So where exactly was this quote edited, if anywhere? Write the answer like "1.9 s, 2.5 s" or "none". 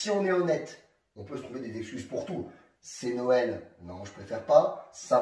none